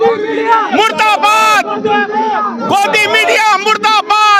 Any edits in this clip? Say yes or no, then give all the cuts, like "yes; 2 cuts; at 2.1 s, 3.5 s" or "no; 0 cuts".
no; 0 cuts